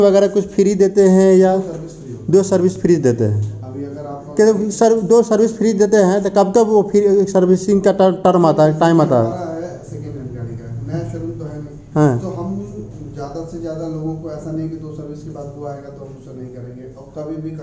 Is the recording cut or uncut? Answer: uncut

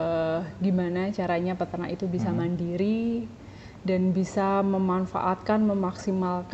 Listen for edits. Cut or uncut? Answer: uncut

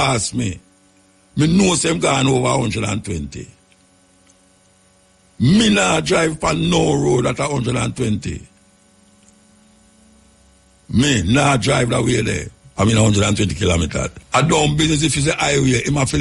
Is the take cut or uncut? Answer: cut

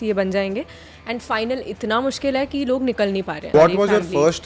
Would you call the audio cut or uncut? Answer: cut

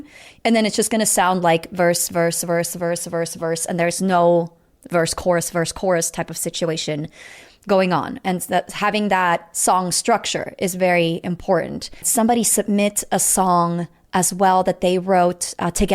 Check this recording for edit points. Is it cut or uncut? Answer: cut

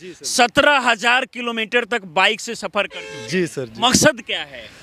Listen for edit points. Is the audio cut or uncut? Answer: uncut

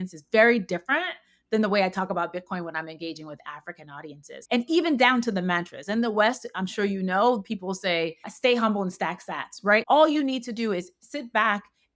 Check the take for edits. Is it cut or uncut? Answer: cut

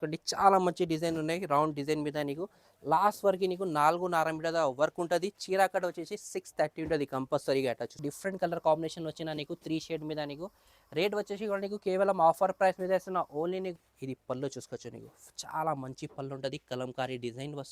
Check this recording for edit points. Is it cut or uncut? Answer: cut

